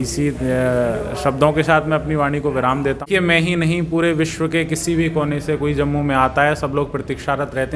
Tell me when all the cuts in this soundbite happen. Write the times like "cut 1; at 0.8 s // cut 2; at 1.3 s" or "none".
cut 1; at 3.0 s